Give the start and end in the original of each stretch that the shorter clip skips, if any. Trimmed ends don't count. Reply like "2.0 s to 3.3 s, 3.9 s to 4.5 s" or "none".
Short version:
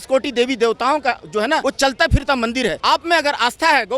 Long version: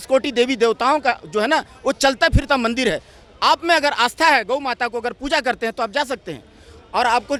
1.6 s to 1.8 s, 3.0 s to 3.4 s